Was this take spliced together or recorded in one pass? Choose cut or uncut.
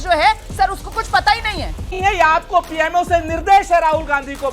cut